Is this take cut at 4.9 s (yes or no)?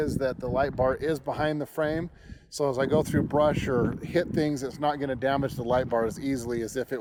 no